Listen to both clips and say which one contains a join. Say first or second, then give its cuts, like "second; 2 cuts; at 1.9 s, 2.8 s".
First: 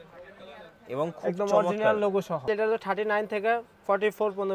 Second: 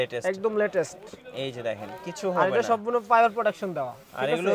first; 1 cut; at 2.5 s